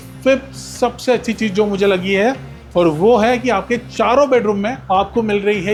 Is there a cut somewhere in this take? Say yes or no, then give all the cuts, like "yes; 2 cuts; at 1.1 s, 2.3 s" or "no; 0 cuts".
no; 0 cuts